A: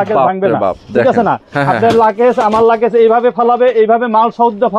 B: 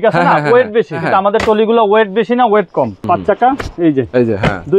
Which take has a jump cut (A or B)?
B